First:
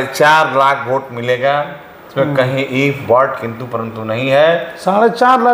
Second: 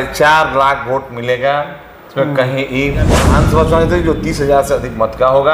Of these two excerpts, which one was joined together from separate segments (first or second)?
second